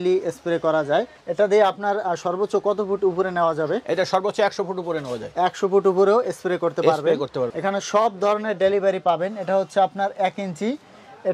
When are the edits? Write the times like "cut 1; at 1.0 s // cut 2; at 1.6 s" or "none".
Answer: cut 1; at 1.2 s // cut 2; at 7.5 s

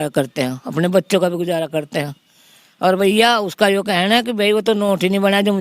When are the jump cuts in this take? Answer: none

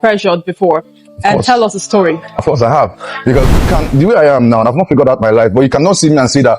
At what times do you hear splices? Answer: cut 1; at 3.7 s

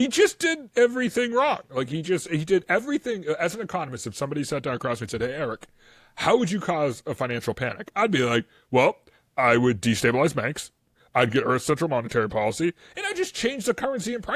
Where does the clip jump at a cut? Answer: none

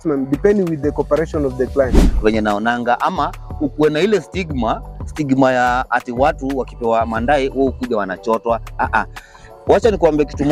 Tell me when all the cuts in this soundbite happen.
cut 1; at 2.1 s

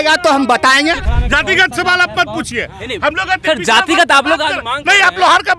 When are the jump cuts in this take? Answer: cut 1; at 1.1 s

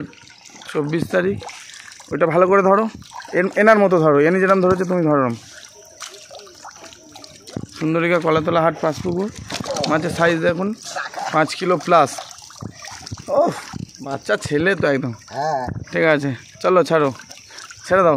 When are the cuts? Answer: none

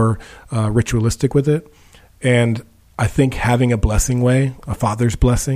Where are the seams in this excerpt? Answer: cut 1; at 4.6 s

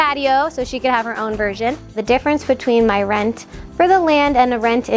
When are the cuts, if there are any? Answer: cut 1; at 2.0 s

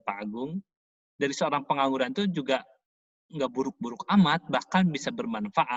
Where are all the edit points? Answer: none

